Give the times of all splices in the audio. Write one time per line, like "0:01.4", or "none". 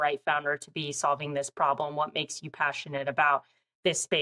none